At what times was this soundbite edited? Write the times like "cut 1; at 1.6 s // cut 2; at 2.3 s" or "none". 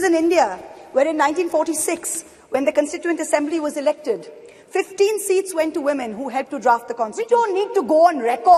cut 1; at 7.2 s